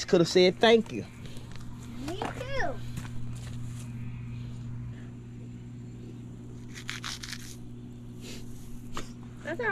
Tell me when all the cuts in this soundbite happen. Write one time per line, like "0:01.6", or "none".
0:04.9